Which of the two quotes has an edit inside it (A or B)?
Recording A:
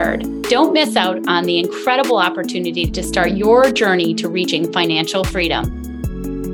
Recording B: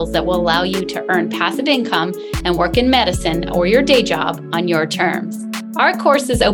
A